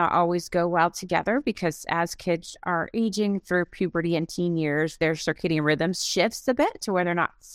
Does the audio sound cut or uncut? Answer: uncut